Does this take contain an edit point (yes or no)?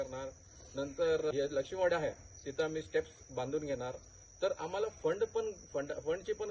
yes